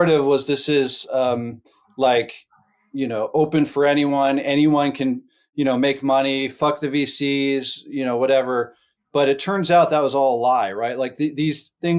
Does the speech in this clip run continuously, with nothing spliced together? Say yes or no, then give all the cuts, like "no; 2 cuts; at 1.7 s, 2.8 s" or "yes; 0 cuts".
yes; 0 cuts